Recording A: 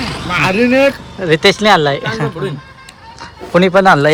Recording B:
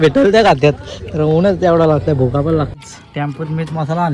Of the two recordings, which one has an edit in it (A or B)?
B